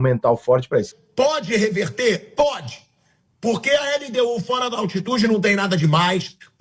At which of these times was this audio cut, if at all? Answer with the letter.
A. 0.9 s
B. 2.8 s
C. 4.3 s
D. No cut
A